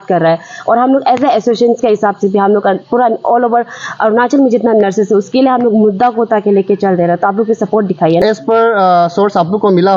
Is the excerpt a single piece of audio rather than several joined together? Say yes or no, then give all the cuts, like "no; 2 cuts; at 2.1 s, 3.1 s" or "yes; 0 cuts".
no; 1 cut; at 8.2 s